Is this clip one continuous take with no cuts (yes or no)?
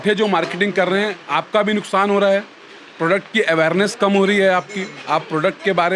yes